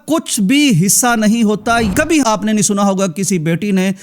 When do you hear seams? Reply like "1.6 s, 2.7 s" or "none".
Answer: 1.9 s

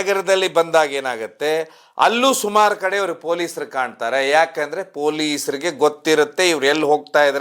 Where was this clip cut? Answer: none

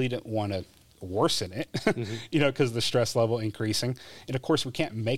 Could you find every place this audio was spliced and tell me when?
none

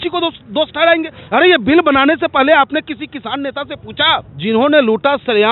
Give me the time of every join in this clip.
4.3 s

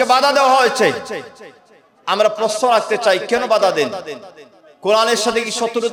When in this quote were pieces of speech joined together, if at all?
none

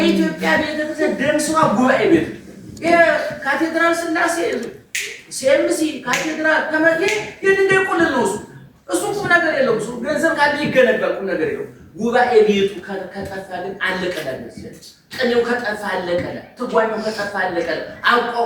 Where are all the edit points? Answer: none

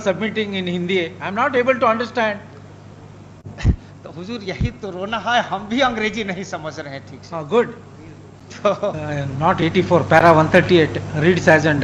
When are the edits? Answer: none

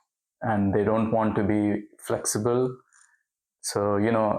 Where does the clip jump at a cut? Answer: none

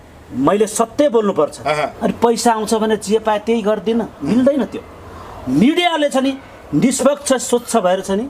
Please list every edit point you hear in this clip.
1.9 s

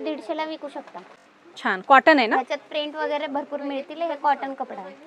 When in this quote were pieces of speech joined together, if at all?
none

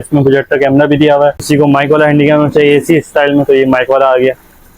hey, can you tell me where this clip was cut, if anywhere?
1.4 s

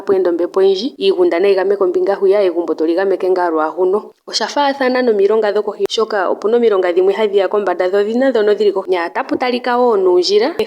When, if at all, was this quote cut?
0.9 s, 4.2 s, 8.8 s

